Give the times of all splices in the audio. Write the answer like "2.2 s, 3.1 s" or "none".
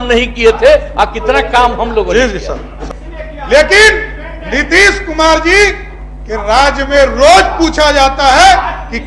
2.8 s